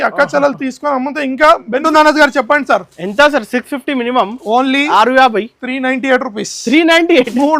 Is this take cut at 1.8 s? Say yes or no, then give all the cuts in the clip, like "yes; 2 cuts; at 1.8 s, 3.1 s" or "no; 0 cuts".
yes; 1 cut; at 1.8 s